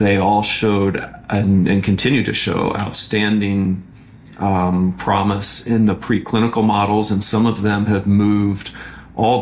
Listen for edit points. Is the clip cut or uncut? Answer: uncut